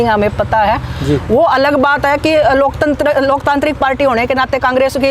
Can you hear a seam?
no; 0 cuts

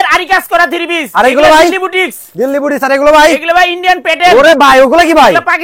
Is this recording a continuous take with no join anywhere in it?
yes; 0 cuts

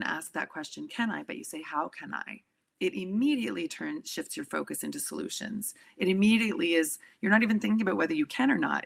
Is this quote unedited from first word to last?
yes; 0 cuts

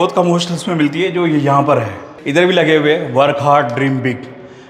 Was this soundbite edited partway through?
yes; 1 cut; at 2.1 s

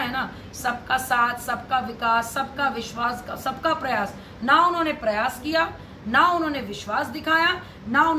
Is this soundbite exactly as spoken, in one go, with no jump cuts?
yes; 0 cuts

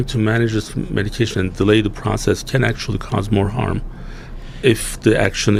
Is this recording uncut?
yes; 0 cuts

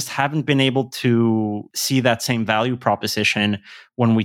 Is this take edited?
yes; 1 cut; at 1.7 s

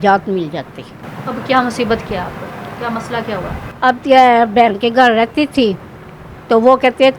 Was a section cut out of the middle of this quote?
no; 0 cuts

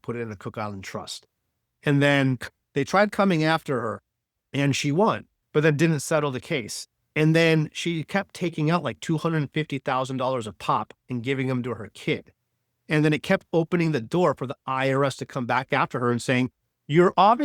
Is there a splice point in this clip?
no; 0 cuts

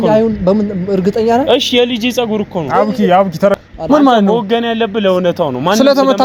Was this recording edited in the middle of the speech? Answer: no; 0 cuts

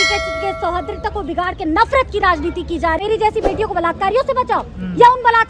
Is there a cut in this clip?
yes; 1 cut; at 3.0 s

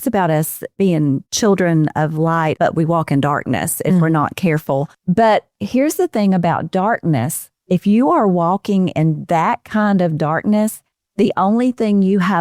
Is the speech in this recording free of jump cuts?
no; 3 cuts; at 1.3 s, 2.6 s, 4.9 s

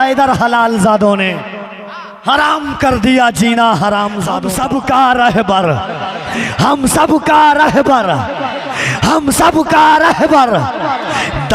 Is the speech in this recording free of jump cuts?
no; 1 cut; at 4.3 s

